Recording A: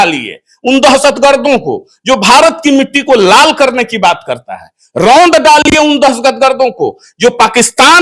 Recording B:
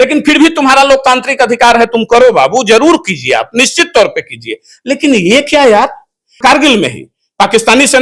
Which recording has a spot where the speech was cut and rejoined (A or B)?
B